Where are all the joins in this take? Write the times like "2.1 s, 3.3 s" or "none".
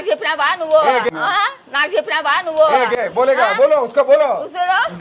none